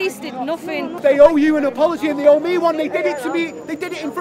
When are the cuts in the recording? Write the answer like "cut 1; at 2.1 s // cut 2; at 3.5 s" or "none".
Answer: cut 1; at 1.0 s